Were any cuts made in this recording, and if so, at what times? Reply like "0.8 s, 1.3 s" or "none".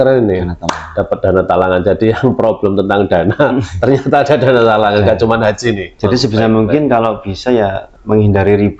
5.9 s, 7.9 s